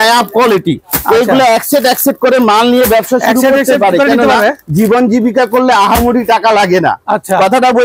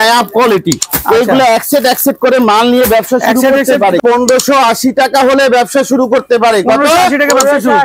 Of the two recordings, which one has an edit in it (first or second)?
second